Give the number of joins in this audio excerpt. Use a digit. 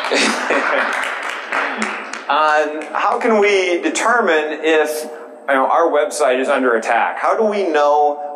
0